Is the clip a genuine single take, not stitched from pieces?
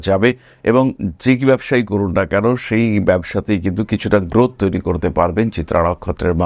yes; 0 cuts

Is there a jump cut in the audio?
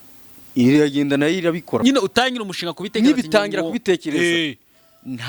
yes; 1 cut; at 1.8 s

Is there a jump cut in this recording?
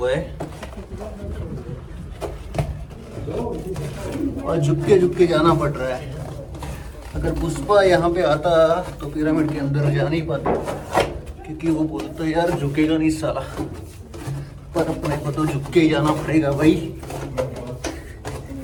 no; 0 cuts

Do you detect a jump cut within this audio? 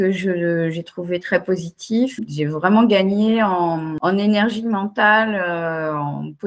yes; 2 cuts; at 2.2 s, 3.9 s

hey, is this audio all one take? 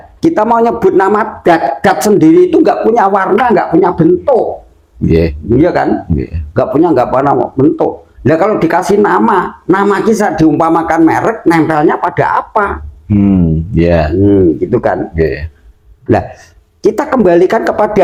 yes; 0 cuts

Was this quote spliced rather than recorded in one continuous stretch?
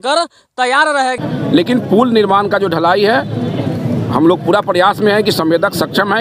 no; 0 cuts

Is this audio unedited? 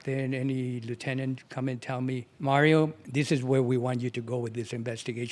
no; 2 cuts; at 2.3 s, 3.0 s

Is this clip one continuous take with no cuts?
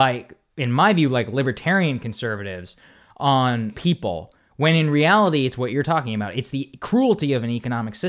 no; 1 cut; at 3.7 s

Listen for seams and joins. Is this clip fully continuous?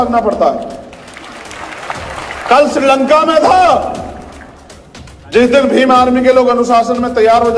yes; 0 cuts

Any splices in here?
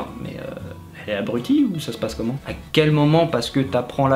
no; 0 cuts

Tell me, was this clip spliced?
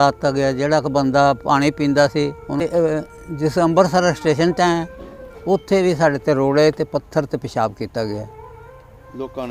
yes; 1 cut; at 2.6 s

